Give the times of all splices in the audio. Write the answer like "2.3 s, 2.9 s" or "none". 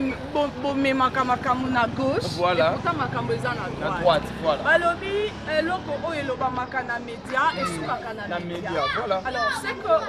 none